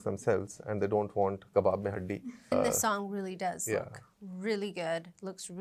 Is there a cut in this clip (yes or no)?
yes